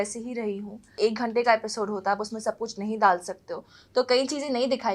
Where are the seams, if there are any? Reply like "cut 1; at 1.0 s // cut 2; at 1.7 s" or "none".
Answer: cut 1; at 0.9 s